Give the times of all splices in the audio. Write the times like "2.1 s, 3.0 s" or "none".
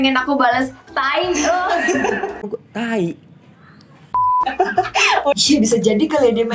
5.3 s